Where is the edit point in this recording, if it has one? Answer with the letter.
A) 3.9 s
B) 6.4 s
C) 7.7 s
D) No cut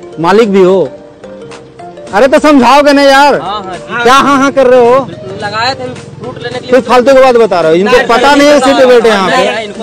D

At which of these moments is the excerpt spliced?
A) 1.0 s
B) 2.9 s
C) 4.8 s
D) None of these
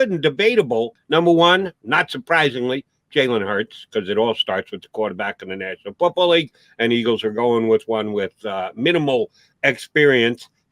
A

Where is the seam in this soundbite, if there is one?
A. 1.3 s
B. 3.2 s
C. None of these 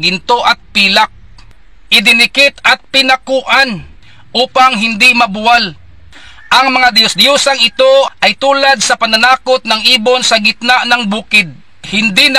A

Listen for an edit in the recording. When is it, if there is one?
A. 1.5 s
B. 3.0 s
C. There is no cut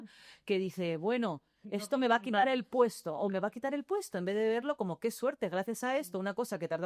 C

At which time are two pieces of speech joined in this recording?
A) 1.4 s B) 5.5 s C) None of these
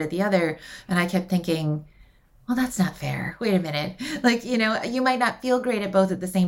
C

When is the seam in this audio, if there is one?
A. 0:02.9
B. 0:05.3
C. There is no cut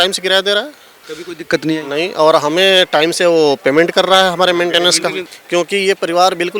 B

